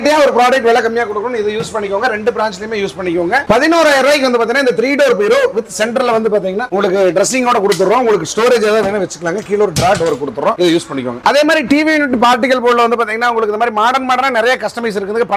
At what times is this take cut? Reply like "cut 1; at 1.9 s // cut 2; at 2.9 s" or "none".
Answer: none